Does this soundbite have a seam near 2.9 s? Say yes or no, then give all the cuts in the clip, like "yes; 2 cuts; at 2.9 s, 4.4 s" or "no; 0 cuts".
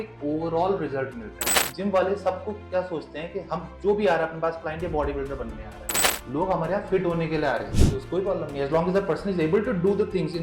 no; 2 cuts; at 1.6 s, 7.7 s